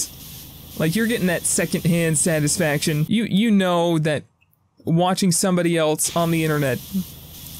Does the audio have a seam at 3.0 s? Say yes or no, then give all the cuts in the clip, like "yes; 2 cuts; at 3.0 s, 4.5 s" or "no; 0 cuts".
no; 0 cuts